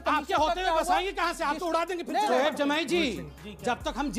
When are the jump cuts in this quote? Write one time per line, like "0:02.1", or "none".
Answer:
0:02.3

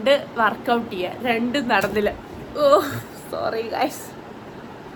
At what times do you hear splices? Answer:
none

